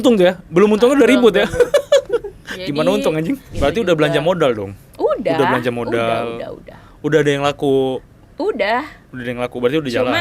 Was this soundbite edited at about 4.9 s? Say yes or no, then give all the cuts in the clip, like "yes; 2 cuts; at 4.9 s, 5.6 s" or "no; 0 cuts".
no; 1 cut; at 3.5 s